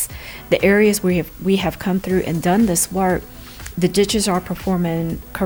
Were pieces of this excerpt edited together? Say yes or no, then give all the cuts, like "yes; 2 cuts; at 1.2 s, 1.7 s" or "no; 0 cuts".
no; 0 cuts